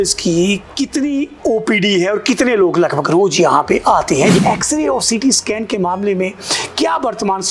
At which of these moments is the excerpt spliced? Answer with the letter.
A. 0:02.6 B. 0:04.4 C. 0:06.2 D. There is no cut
B